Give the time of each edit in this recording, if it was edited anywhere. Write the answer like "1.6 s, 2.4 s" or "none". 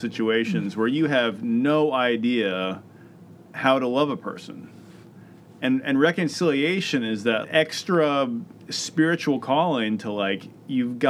7.5 s